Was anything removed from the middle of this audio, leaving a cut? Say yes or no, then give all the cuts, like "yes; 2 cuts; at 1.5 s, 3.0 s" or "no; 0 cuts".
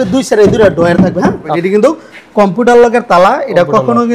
yes; 1 cut; at 1.5 s